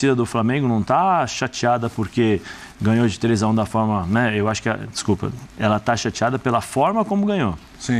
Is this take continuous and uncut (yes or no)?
yes